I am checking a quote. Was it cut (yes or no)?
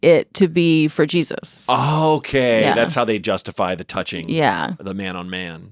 no